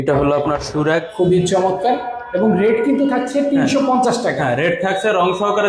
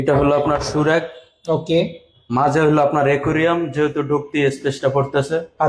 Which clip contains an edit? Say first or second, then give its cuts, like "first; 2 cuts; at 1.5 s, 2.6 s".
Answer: first; 1 cut; at 1.1 s